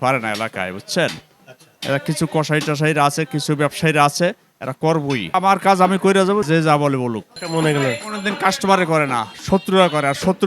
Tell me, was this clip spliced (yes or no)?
yes